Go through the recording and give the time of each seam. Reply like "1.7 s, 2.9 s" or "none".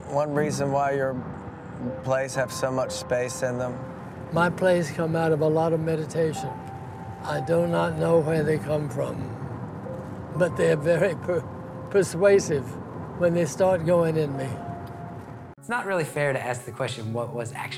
15.6 s